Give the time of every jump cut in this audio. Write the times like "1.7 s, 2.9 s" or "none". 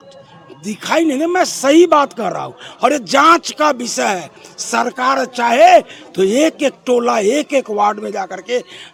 none